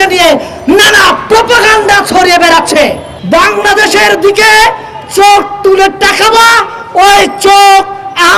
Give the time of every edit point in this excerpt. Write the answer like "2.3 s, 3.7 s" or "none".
3.1 s